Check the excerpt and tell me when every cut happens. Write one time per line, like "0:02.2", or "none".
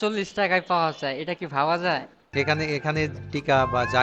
0:02.2